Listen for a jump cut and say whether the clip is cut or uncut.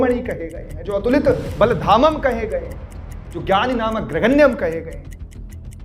uncut